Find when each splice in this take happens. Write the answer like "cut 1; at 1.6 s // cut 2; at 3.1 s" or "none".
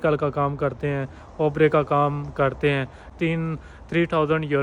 cut 1; at 3.1 s